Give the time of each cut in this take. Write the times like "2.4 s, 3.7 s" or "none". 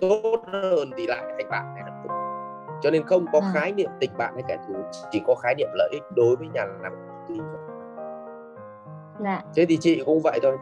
7.6 s, 9.0 s